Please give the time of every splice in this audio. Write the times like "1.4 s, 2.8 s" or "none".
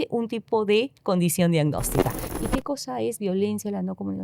2.2 s